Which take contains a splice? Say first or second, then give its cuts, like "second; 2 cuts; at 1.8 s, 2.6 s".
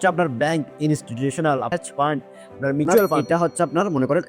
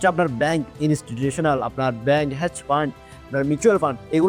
first; 2 cuts; at 1.7 s, 3.2 s